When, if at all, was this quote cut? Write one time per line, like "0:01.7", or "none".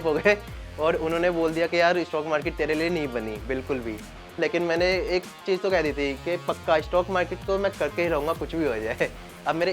0:04.4